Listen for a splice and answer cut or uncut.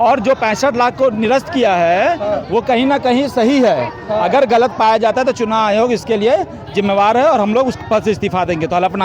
uncut